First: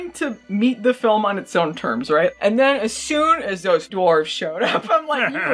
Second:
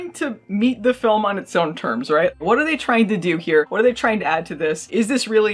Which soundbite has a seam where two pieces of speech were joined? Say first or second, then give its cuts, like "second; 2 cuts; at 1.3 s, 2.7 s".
first; 2 cuts; at 2.4 s, 3.9 s